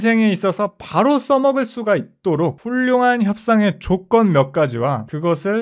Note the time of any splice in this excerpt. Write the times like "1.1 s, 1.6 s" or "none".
2.6 s